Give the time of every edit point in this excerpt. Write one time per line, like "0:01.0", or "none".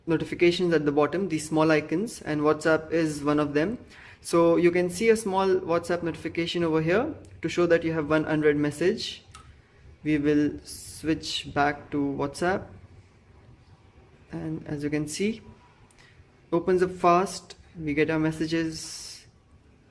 none

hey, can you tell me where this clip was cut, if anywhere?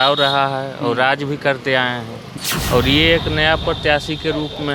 0:02.2

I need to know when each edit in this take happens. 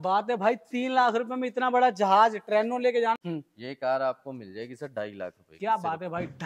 0:03.2

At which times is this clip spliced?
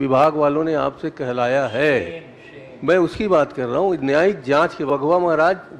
0:04.9

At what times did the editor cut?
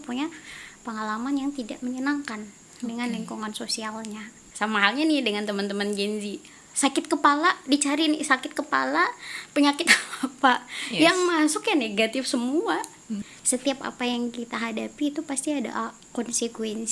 0:04.4
0:13.2

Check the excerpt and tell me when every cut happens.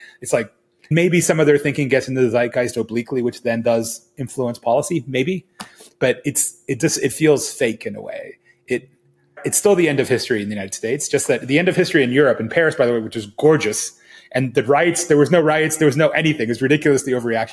0:00.9
0:09.4

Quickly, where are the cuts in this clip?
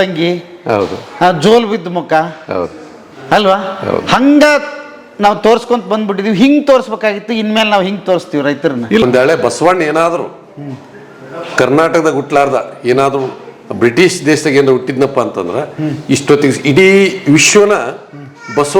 0:09.0

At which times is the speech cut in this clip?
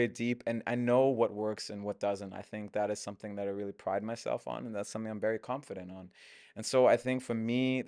none

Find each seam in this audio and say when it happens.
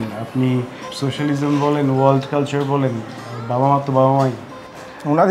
none

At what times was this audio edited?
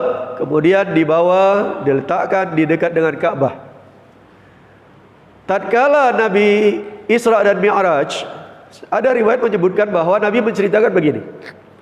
none

